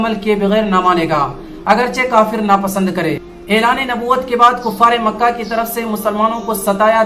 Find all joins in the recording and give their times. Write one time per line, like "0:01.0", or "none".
0:03.3